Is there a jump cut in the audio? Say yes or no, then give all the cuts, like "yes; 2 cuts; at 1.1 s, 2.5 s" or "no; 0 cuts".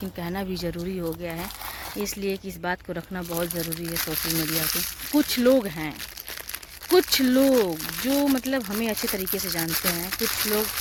no; 0 cuts